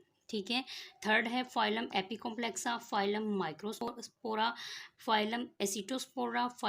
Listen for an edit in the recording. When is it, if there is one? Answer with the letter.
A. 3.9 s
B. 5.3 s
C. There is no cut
A